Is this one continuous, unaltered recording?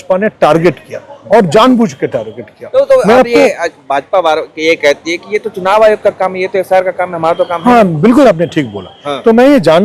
yes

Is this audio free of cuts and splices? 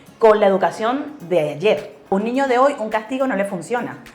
no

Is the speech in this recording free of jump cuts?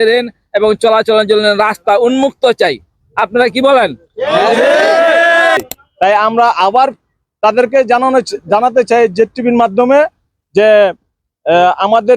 no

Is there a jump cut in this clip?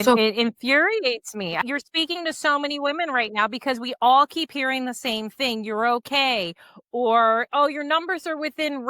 yes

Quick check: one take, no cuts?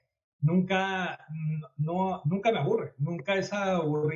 yes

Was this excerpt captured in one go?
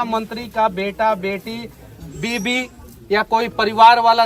yes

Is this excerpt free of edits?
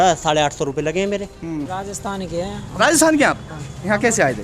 no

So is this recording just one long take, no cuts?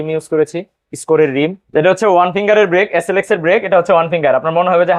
no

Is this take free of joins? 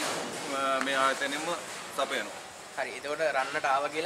yes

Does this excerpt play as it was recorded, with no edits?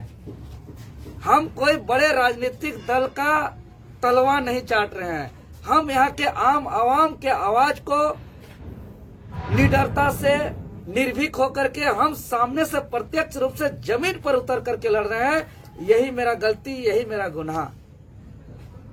yes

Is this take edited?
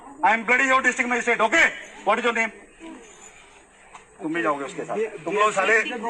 no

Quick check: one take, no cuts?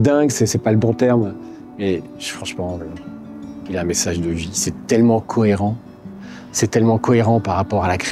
yes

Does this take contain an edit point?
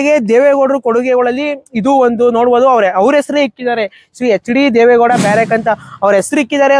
no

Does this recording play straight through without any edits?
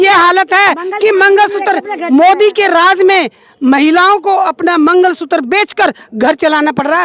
yes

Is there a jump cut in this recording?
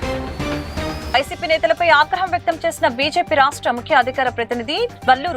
no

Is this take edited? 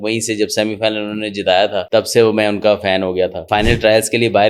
yes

